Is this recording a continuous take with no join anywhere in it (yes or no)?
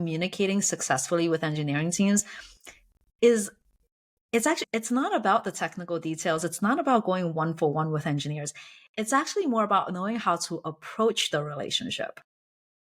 yes